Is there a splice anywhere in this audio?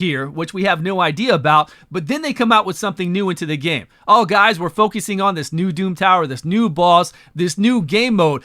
no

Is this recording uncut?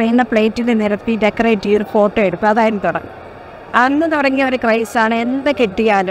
yes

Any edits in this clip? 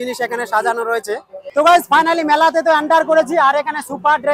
yes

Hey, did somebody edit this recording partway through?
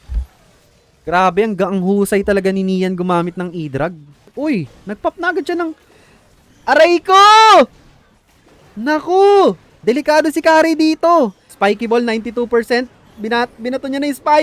yes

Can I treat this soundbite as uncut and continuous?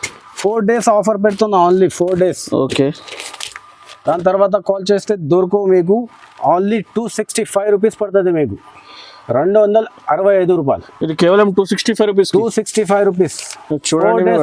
yes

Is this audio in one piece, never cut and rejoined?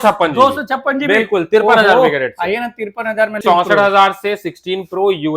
no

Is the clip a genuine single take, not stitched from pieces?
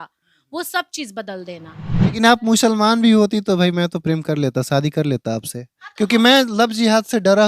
no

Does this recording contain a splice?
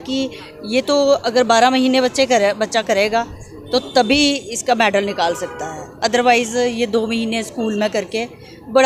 no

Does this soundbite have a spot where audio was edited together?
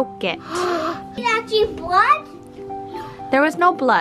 yes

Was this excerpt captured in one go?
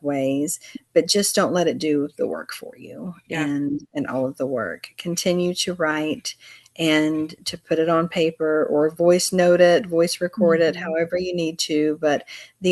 yes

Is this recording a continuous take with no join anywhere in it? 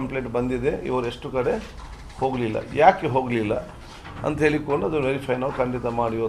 yes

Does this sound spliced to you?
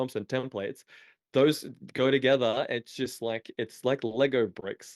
no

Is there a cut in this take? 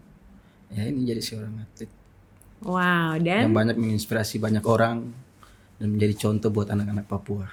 no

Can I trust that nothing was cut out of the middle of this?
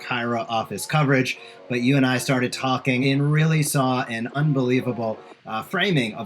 no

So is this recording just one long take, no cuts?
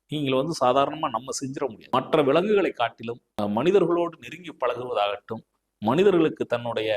no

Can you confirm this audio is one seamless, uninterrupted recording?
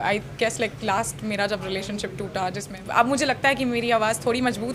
no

